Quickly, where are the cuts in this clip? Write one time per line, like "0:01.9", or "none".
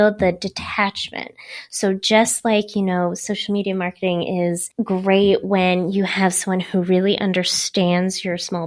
0:04.7